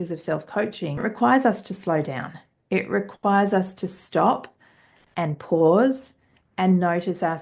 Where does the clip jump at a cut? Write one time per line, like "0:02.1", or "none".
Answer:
0:01.0